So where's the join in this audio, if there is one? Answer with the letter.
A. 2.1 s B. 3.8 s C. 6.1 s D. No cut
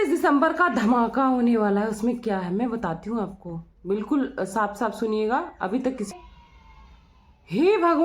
C